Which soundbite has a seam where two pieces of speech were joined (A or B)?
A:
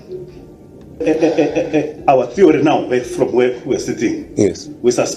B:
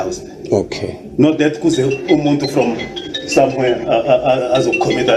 A